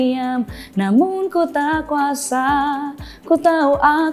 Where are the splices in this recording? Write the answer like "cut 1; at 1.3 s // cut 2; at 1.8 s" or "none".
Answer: none